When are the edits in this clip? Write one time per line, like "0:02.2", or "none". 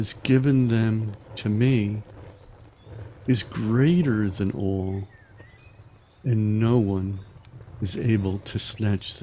none